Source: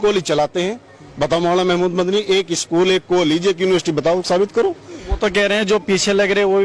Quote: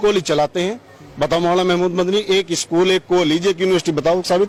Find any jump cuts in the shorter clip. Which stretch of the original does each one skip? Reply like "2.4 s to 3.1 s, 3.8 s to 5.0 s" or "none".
none

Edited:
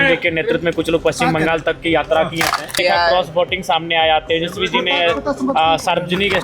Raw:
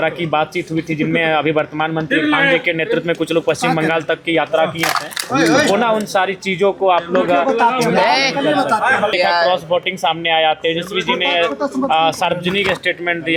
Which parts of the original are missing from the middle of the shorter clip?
5.2 s to 9.1 s

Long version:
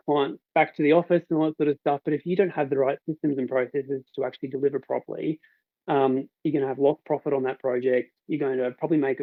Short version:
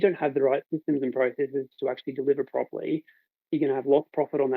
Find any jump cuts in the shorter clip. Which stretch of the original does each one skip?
5.8 s to 6.3 s

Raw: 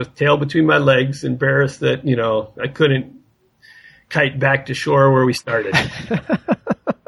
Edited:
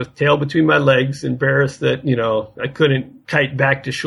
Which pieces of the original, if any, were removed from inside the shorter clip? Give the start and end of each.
3.2 s to 4.0 s

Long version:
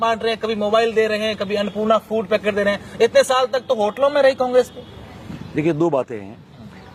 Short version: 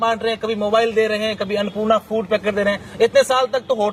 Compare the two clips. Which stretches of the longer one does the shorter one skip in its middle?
none

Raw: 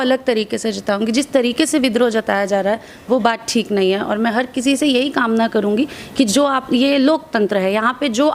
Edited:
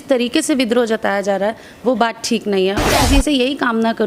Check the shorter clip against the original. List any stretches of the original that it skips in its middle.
4.1 s to 4.4 s

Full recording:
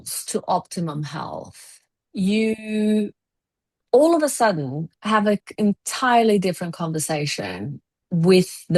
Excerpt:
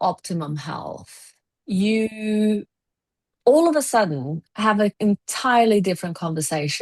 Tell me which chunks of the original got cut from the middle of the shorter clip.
5.4 s to 5.5 s

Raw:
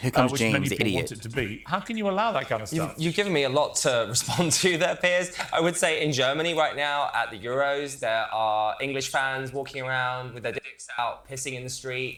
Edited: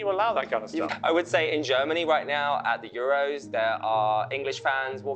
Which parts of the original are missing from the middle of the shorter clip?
2.9 s to 5.4 s

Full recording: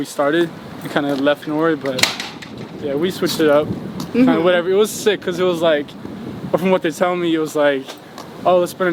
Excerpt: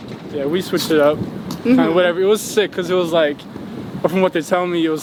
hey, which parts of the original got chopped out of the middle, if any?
none

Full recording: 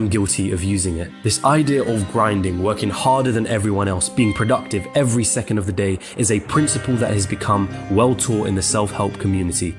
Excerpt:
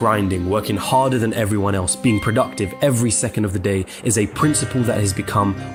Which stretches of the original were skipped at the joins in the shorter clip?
none

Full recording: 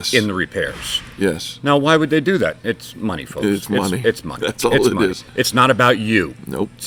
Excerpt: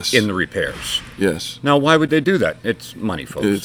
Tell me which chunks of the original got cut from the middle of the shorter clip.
none

